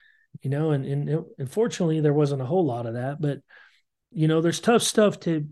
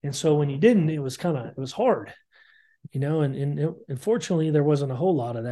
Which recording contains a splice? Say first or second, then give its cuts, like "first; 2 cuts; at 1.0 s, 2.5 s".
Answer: first; 1 cut; at 4.1 s